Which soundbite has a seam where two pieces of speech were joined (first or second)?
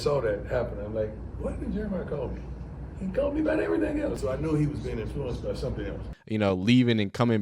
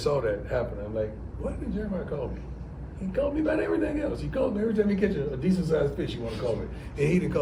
first